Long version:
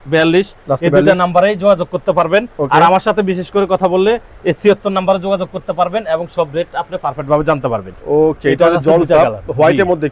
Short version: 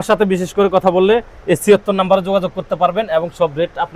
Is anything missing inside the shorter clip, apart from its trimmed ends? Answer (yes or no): no